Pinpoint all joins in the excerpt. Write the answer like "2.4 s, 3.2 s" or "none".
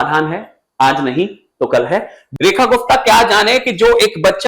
2.2 s